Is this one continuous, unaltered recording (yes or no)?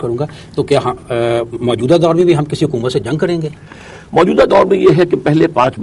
yes